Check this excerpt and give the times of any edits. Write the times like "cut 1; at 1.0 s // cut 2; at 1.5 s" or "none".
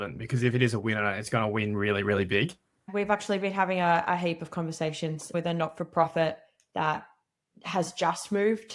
cut 1; at 2.9 s // cut 2; at 5.3 s